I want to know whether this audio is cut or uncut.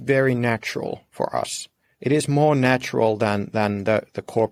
uncut